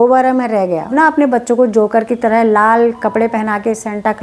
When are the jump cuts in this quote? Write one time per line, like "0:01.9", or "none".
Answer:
0:00.9